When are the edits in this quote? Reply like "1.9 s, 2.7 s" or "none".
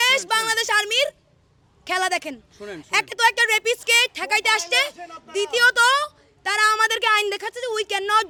none